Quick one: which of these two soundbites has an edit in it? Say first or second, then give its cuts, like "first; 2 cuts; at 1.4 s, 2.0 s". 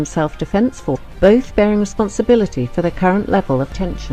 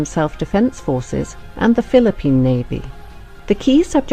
second; 1 cut; at 1.0 s